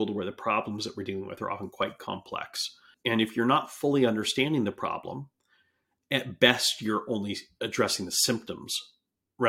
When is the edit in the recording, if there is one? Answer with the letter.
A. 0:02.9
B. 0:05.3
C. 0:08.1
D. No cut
A